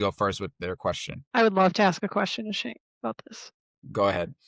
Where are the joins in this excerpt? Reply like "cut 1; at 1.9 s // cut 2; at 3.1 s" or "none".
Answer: cut 1; at 1.1 s